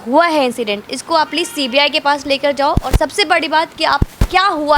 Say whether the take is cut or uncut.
uncut